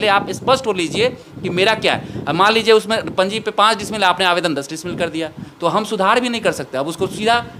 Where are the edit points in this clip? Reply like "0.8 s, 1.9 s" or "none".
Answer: none